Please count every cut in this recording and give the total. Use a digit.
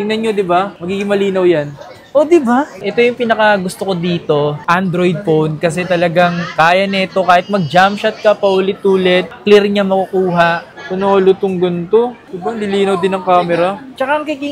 2